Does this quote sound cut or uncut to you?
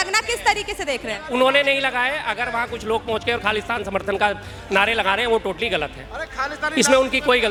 uncut